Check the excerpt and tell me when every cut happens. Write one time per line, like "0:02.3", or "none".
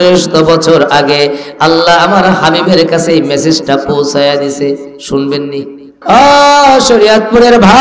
0:05.9